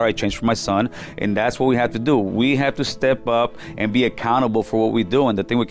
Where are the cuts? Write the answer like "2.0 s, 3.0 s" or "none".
none